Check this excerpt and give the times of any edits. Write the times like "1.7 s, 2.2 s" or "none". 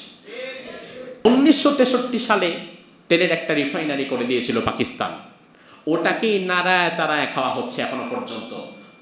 1.2 s